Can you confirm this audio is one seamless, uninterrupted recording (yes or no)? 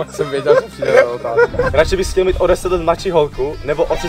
no